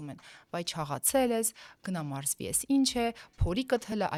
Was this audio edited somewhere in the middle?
no; 0 cuts

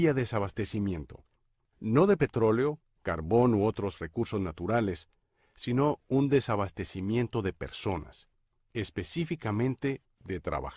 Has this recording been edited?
yes; 1 cut; at 7.7 s

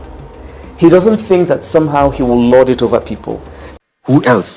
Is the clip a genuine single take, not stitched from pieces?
no; 1 cut; at 3.6 s

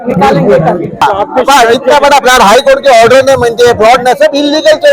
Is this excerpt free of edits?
no; 1 cut; at 1.0 s

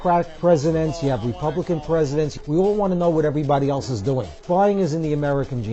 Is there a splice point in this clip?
yes; 2 cuts; at 2.3 s, 4.4 s

